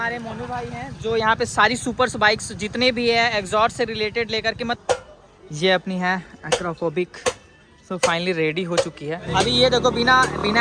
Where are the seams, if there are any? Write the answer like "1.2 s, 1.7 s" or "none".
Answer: 4.8 s, 9.2 s